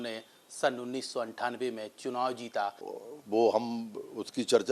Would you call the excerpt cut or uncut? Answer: cut